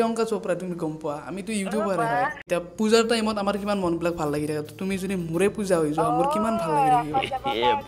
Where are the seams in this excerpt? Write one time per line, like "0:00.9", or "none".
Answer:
0:02.4